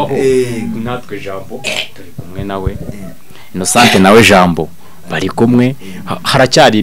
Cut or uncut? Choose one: uncut